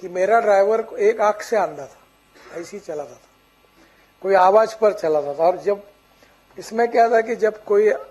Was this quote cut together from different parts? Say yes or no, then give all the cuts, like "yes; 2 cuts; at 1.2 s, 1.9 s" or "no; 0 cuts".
no; 0 cuts